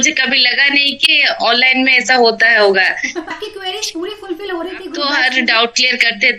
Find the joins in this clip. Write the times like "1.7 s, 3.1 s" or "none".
3.3 s, 5.0 s